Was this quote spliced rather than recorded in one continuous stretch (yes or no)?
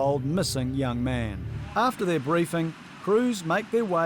yes